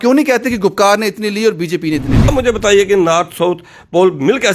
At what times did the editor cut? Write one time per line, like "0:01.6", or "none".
0:02.3